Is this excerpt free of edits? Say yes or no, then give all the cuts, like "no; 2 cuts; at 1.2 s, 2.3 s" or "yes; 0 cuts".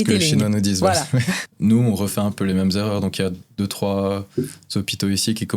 no; 1 cut; at 1.4 s